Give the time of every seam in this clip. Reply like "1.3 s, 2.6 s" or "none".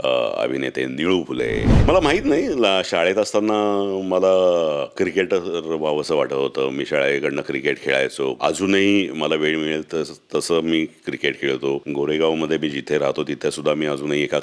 1.7 s, 8.4 s, 11.8 s